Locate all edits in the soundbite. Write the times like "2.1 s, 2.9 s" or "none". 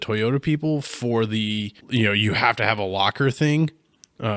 1.8 s